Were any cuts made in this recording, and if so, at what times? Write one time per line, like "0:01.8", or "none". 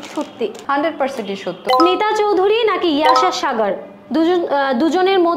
0:01.6